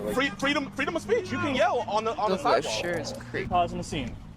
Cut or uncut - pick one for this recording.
cut